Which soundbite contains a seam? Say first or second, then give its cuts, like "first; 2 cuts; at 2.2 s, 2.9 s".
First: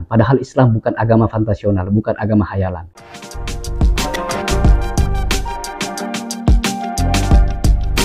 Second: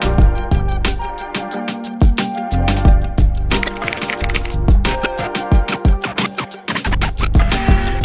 first; 1 cut; at 2.9 s